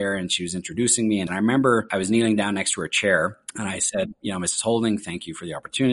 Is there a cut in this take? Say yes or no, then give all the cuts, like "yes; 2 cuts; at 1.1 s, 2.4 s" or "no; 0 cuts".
yes; 3 cuts; at 1.3 s, 1.9 s, 3.5 s